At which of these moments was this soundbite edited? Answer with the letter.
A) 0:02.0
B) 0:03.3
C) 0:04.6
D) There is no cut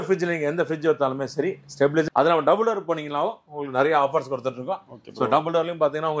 A